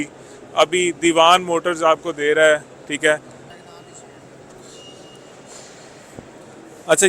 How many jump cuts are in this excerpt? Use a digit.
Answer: 1